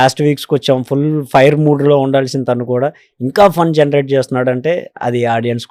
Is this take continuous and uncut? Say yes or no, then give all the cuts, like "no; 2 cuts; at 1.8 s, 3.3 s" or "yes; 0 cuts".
yes; 0 cuts